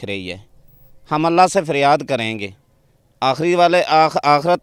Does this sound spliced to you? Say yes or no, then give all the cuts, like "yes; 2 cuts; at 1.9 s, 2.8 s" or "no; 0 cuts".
no; 0 cuts